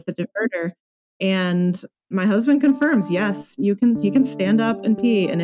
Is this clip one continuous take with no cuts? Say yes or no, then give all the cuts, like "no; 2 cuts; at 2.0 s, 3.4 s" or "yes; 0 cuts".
yes; 0 cuts